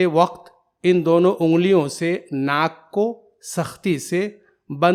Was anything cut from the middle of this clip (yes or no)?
no